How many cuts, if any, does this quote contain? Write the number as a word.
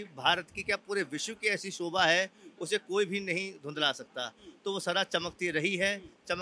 zero